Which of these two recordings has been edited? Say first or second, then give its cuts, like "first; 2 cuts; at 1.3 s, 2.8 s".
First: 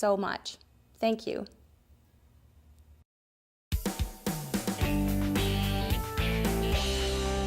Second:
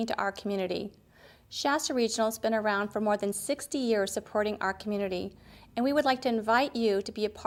first; 1 cut; at 3.4 s